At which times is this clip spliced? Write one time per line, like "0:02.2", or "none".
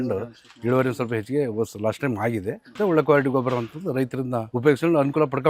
0:02.7
0:04.5